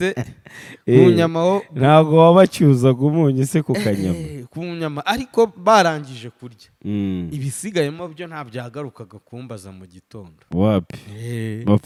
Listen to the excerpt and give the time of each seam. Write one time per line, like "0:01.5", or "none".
none